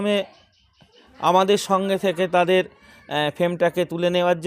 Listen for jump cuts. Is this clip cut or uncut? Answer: uncut